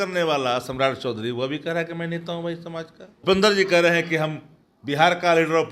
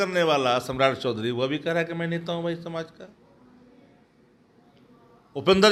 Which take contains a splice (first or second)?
first